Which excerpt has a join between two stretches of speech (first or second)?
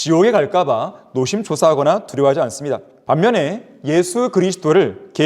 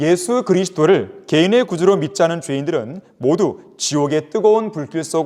first